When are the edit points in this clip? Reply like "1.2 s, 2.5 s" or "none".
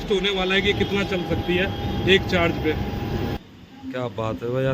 3.4 s